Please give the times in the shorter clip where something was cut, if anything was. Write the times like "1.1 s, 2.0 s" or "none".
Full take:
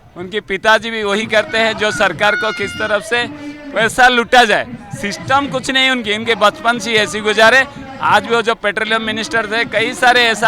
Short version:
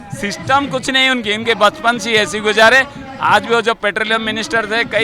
none